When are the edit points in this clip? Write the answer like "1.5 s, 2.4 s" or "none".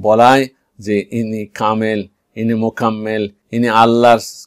3.4 s